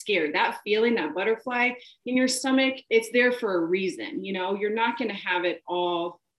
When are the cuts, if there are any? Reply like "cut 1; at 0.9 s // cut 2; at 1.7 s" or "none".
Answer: cut 1; at 2.8 s